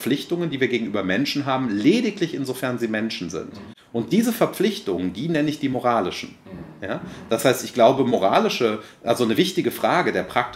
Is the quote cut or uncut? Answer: uncut